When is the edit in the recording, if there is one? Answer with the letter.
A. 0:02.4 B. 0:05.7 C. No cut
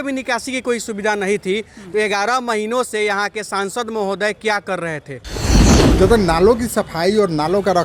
B